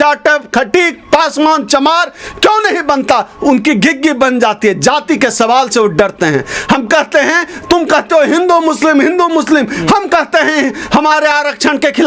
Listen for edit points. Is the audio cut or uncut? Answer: uncut